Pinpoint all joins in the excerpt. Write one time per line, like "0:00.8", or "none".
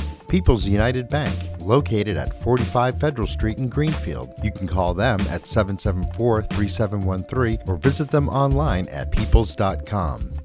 none